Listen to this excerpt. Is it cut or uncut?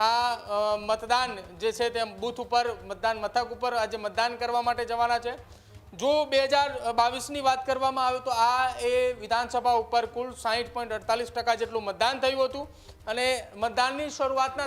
uncut